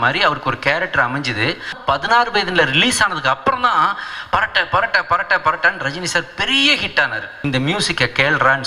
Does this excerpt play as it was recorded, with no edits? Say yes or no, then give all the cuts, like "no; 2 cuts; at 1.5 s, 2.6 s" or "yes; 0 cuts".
no; 2 cuts; at 1.8 s, 7.3 s